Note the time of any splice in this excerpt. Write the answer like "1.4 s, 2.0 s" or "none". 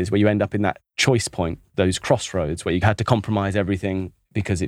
0.9 s, 2.8 s